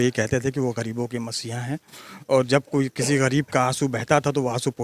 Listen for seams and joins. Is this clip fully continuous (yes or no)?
yes